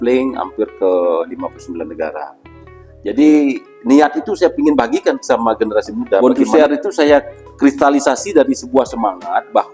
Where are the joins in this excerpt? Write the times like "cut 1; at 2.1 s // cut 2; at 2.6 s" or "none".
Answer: cut 1; at 6.2 s